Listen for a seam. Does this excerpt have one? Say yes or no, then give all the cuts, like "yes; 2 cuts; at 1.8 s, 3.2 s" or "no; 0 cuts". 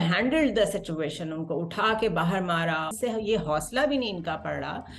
yes; 1 cut; at 2.9 s